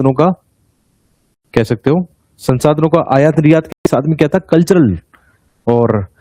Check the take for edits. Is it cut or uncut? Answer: uncut